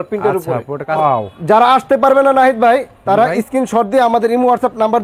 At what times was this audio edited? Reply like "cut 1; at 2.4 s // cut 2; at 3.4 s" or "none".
cut 1; at 1.0 s